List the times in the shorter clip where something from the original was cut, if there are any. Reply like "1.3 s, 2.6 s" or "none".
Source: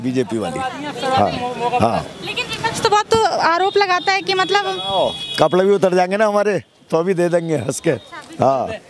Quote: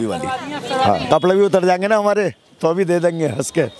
1.0 s